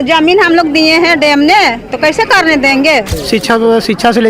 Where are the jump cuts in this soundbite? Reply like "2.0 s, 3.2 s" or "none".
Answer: 3.1 s